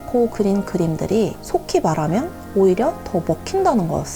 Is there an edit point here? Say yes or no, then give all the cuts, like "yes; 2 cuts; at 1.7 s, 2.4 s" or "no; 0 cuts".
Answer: yes; 1 cut; at 1.4 s